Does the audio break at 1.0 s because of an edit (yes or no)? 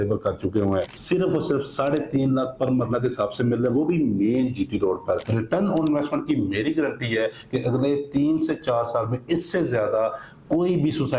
yes